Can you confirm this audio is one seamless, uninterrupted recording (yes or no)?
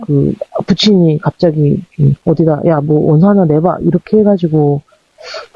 no